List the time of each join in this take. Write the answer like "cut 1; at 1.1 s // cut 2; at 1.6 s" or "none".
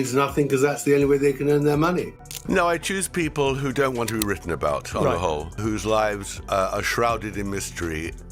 cut 1; at 2.4 s